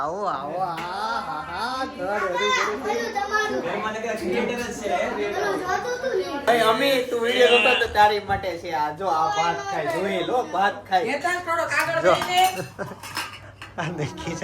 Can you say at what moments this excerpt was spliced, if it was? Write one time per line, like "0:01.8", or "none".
0:06.4